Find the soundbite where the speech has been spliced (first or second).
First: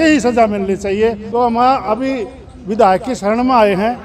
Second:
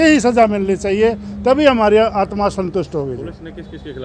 first